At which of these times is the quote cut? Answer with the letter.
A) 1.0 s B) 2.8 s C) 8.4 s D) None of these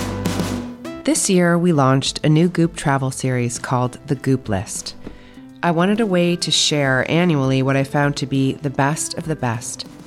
A